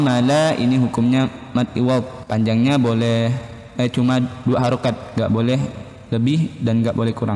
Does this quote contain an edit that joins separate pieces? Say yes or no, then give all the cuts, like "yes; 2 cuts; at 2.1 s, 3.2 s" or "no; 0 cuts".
yes; 1 cut; at 2.2 s